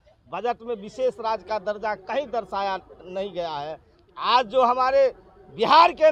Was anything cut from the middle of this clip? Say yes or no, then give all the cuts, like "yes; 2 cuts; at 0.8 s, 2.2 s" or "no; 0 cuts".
no; 0 cuts